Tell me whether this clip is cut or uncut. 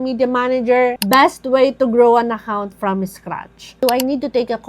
cut